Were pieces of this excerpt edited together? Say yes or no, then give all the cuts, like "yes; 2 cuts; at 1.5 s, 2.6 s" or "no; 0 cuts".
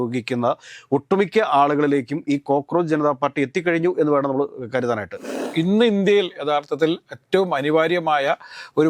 yes; 1 cut; at 5.3 s